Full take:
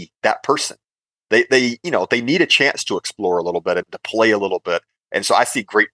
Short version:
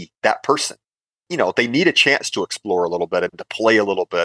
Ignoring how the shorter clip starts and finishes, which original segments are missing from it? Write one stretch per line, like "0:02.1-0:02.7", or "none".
0:01.2-0:01.8